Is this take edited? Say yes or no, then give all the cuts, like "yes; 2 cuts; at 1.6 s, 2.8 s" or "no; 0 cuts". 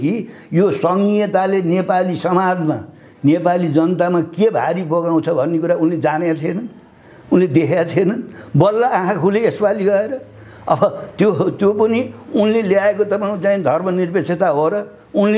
no; 0 cuts